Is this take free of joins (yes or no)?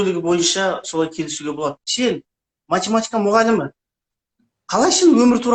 no